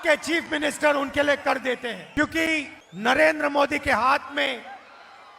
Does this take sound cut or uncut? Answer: cut